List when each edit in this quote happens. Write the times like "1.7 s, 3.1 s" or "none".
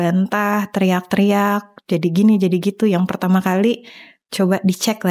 none